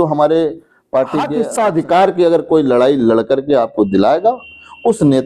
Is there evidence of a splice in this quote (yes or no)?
yes